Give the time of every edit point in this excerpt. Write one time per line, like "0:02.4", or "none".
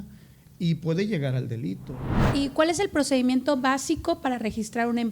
0:02.1